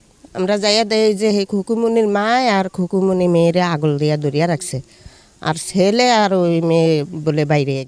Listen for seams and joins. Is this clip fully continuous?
yes; 0 cuts

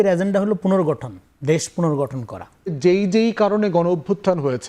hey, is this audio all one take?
no; 1 cut; at 2.8 s

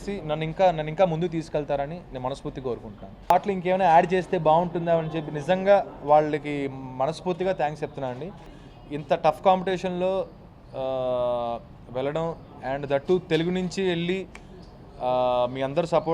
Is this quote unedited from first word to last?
no; 2 cuts; at 3.3 s, 8.6 s

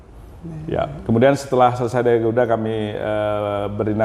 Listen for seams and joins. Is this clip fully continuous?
yes; 0 cuts

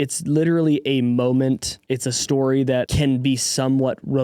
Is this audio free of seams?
no; 2 cuts; at 1.7 s, 2.9 s

